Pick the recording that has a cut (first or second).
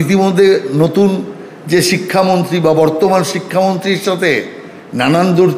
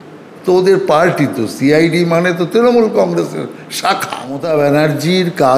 second